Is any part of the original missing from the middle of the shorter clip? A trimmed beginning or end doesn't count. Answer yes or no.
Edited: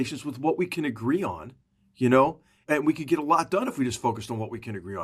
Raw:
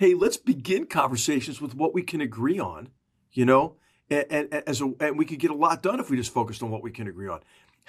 yes